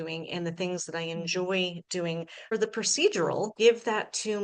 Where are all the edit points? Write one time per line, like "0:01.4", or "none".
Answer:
0:02.5
0:03.5